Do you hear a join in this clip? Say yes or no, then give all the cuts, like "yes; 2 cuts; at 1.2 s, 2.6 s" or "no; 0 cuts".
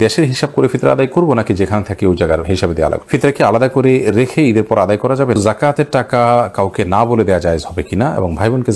yes; 2 cuts; at 3.0 s, 5.4 s